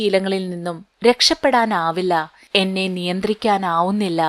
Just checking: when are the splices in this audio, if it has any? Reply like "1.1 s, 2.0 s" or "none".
none

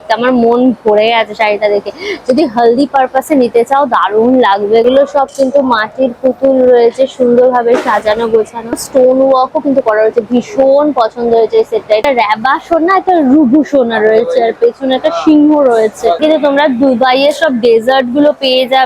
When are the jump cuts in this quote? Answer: 4.8 s, 8.8 s, 12.0 s, 16.1 s

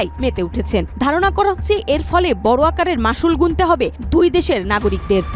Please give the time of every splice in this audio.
none

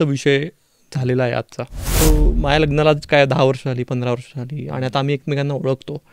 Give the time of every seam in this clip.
2.0 s

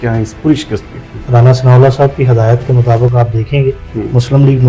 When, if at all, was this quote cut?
1.2 s, 3.8 s

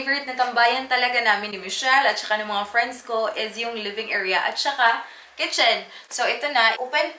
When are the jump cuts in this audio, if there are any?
none

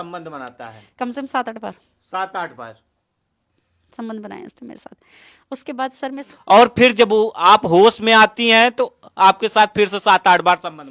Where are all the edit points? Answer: none

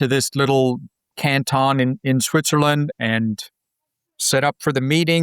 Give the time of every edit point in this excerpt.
2.9 s

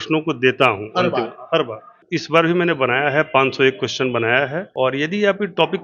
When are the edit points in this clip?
2.0 s, 4.6 s

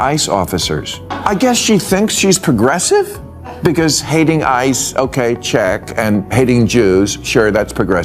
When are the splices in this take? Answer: 1.1 s

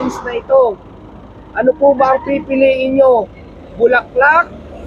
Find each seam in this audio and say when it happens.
none

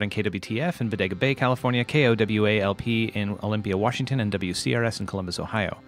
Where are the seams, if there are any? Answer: none

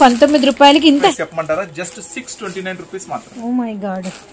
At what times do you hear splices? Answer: 1.1 s

